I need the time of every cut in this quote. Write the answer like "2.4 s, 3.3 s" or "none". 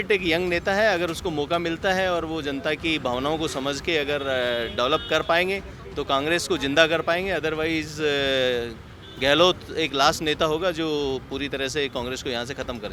none

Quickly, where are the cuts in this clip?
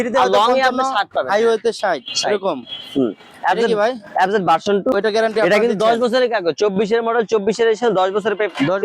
4.9 s

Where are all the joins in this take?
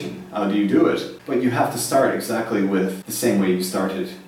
1.1 s, 3.0 s

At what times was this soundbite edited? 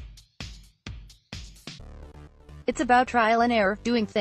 2.1 s

